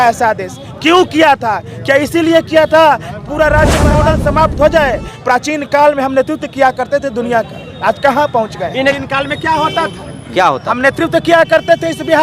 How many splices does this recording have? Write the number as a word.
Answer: two